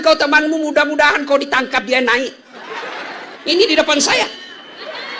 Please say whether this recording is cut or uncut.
cut